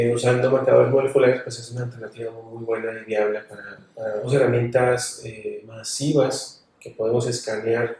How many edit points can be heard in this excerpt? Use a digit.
1